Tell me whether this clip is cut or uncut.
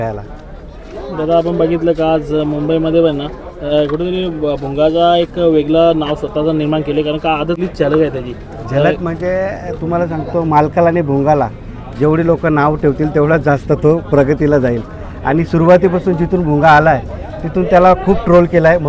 uncut